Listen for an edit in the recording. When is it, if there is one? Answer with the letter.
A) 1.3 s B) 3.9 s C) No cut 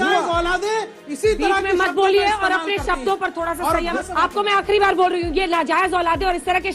B